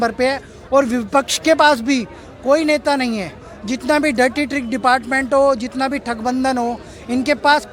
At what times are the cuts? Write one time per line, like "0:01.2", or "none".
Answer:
none